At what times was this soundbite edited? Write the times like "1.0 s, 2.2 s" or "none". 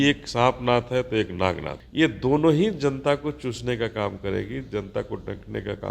1.7 s

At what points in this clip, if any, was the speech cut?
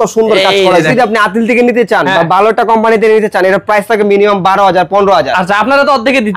0.9 s

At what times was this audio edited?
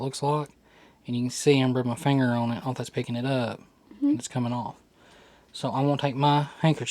none

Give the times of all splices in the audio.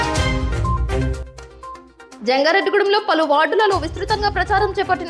1.7 s

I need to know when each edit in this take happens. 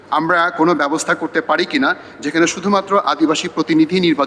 none

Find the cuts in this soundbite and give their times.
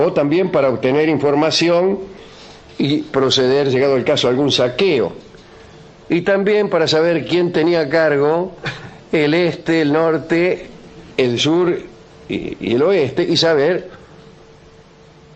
3.1 s

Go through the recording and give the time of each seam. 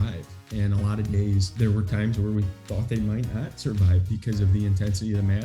1.5 s

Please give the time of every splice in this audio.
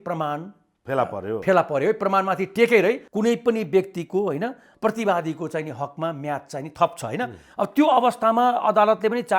3.1 s

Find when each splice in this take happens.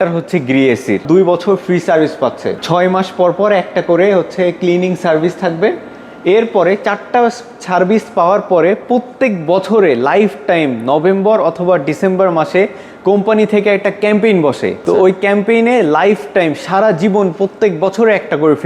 1.0 s, 2.6 s, 14.8 s

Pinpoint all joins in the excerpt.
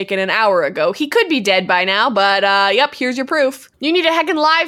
3.7 s

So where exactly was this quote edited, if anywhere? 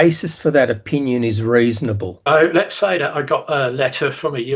2.1 s

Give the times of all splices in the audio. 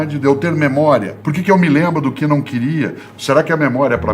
1.2 s

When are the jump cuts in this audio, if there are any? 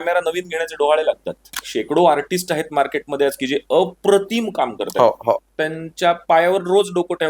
1.5 s

